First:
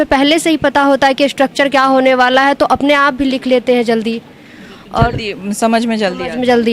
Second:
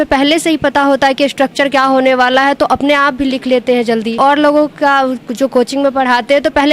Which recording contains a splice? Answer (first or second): second